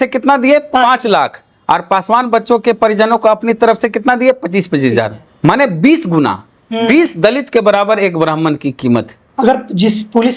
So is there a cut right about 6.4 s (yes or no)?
no